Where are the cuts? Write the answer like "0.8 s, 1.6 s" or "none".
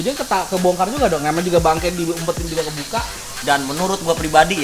3.2 s